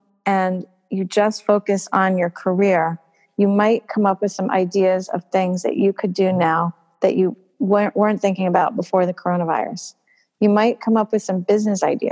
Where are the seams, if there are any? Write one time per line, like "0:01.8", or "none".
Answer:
none